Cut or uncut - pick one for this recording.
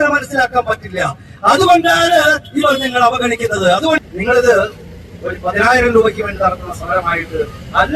cut